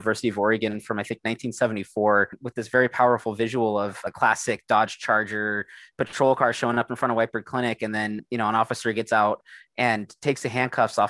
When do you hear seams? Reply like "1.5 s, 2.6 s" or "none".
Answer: 2.3 s, 4.1 s